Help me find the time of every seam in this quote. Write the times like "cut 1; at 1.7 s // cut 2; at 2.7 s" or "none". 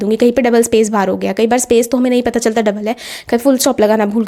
none